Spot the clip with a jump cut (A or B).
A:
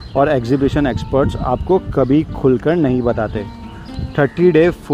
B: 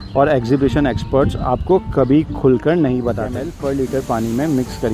B